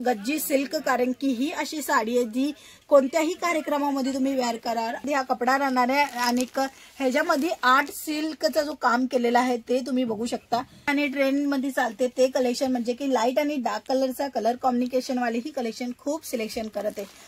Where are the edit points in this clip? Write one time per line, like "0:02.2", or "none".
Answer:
0:05.0
0:10.9